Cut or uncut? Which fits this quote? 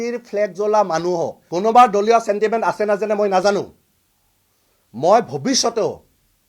cut